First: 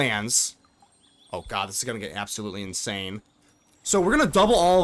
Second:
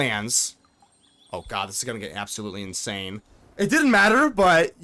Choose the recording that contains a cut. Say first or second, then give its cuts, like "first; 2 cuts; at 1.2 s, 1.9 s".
second; 1 cut; at 3.4 s